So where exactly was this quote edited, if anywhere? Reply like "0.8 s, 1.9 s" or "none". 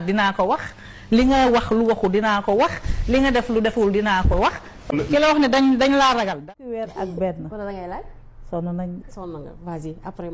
6.4 s